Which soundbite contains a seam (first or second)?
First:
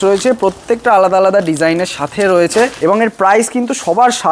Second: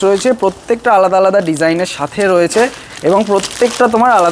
first